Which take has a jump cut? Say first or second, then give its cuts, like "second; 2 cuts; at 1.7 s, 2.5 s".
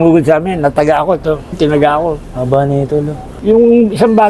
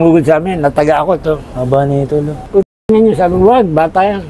second; 2 cuts; at 1.5 s, 2.5 s